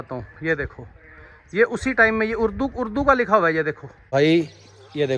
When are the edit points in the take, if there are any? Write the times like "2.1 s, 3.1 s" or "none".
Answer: 4.0 s